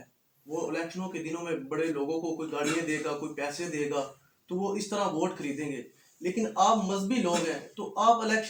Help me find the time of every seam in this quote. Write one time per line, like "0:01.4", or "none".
none

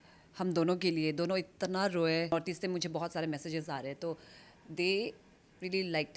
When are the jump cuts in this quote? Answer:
0:02.3

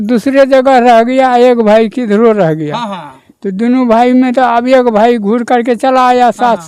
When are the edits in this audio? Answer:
none

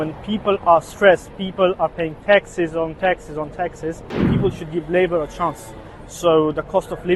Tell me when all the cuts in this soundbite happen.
0:04.3

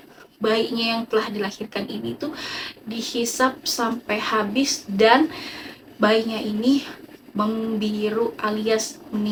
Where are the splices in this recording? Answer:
none

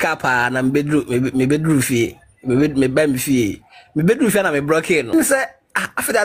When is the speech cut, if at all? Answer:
0:05.1

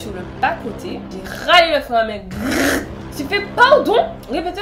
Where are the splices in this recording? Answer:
none

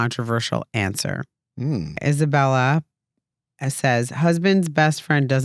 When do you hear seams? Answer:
0:02.0

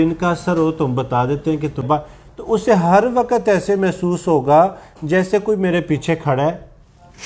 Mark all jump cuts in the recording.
0:01.8

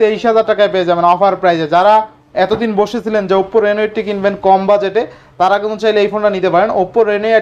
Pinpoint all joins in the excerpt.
none

